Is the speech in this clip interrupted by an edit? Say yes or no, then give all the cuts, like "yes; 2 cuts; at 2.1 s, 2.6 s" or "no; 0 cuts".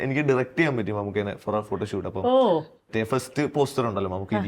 yes; 1 cut; at 2.8 s